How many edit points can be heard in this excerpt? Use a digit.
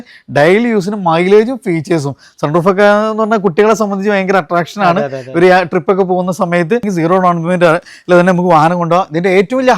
1